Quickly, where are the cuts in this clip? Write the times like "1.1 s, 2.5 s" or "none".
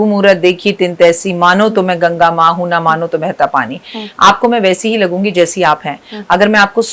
none